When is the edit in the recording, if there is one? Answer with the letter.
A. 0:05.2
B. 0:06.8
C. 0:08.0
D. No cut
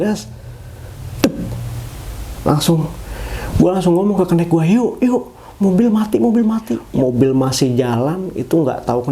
B